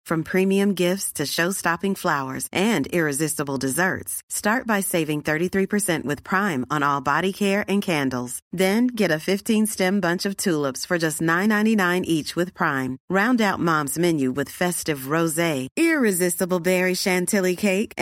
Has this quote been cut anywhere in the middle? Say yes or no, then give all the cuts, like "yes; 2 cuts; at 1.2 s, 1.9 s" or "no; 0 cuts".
no; 0 cuts